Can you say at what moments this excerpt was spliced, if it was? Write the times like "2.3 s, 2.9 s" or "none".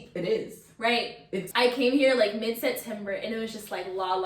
1.4 s